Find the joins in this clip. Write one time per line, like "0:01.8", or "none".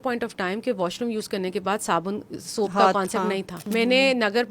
0:03.5

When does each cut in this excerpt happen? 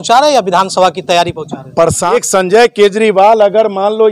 0:02.1

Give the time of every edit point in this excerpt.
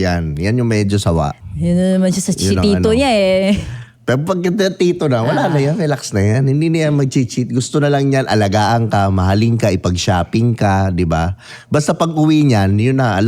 0:01.4

